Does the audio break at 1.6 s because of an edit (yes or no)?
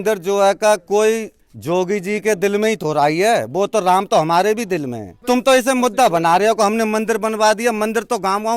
no